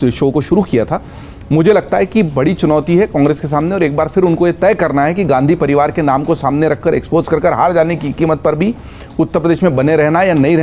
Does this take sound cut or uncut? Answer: uncut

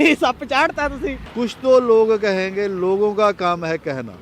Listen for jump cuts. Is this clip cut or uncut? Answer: cut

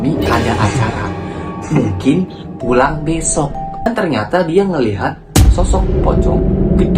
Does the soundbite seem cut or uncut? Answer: cut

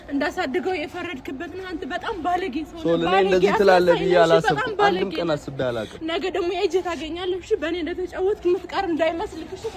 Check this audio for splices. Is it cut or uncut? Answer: uncut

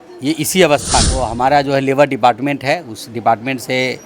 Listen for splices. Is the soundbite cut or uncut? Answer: cut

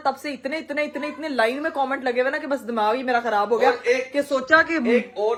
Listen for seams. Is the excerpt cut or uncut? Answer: uncut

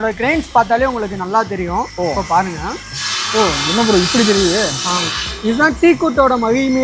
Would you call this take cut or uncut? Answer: uncut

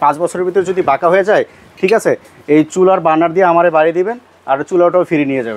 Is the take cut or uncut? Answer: uncut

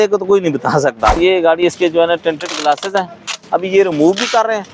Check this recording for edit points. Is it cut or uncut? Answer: cut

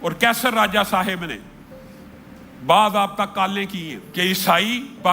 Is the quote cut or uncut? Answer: cut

